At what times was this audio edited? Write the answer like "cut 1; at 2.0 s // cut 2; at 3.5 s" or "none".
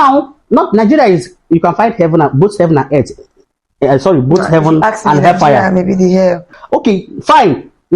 cut 1; at 6.5 s